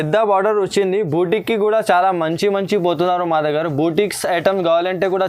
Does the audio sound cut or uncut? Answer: uncut